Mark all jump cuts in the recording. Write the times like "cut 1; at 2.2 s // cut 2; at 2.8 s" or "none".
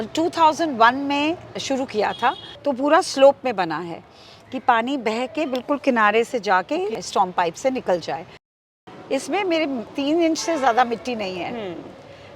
cut 1; at 2.5 s // cut 2; at 7.0 s // cut 3; at 8.6 s // cut 4; at 9.9 s